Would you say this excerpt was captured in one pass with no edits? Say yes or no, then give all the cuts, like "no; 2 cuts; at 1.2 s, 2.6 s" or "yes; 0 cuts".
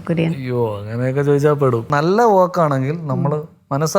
no; 1 cut; at 1.9 s